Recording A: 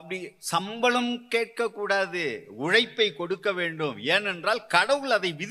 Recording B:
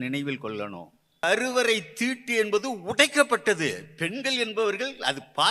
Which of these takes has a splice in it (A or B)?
B